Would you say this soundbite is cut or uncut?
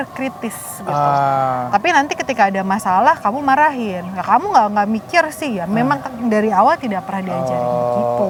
uncut